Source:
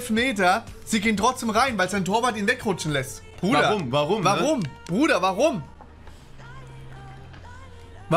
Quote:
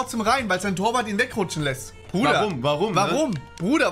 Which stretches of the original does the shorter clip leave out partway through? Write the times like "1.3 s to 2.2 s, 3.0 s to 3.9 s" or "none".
none